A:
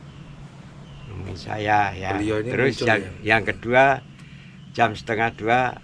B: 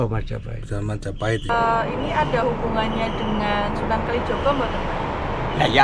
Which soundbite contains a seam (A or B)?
B